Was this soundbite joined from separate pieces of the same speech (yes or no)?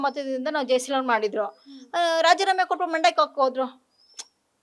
no